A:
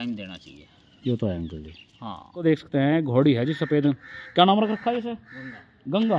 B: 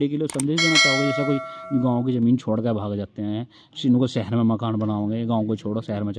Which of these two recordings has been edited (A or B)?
A